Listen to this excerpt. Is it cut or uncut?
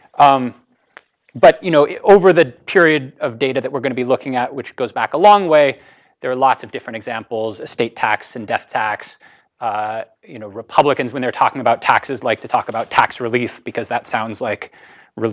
uncut